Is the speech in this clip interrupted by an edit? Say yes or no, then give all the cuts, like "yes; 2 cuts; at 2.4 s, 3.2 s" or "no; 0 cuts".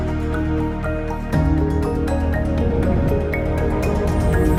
no; 0 cuts